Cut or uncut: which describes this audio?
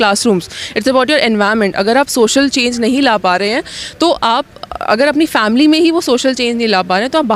uncut